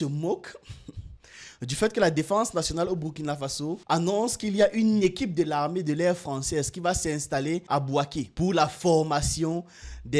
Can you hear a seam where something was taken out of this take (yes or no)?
no